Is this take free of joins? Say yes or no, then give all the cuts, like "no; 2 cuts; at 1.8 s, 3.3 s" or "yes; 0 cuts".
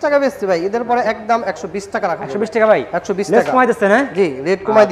yes; 0 cuts